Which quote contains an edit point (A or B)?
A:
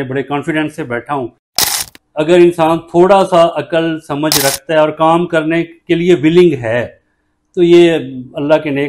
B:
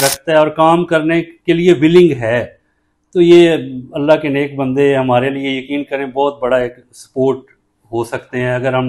A